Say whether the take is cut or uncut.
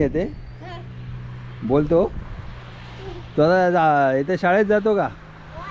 uncut